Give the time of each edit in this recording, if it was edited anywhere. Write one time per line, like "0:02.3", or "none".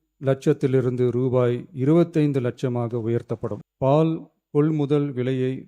0:03.6

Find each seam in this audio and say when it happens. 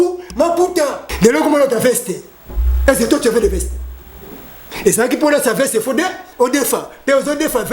0:01.0

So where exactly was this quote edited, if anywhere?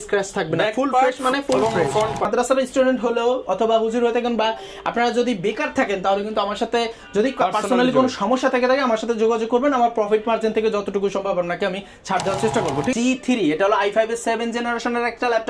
0:02.2
0:12.9

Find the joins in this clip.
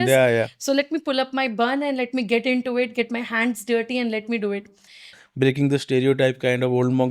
0:05.1

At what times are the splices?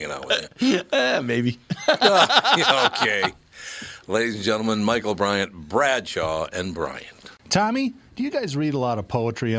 0:07.3

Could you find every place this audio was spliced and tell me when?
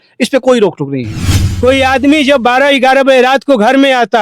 0:01.4

